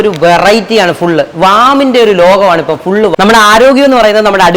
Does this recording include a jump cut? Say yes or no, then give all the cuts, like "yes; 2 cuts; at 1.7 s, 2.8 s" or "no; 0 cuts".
yes; 1 cut; at 3.1 s